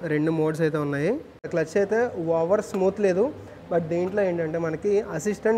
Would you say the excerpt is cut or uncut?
cut